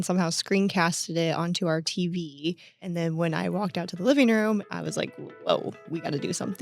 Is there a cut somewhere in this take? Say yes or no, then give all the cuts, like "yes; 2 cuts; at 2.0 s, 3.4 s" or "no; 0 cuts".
yes; 3 cuts; at 2.8 s, 4.6 s, 5.8 s